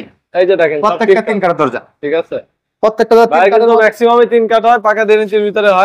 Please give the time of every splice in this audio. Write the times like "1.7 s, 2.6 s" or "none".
none